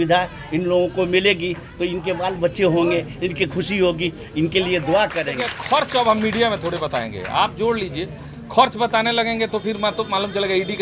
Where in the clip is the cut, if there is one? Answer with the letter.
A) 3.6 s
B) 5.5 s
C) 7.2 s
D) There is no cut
B